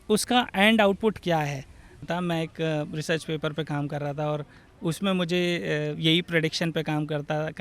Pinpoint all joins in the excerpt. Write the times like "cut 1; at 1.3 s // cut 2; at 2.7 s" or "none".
cut 1; at 2.1 s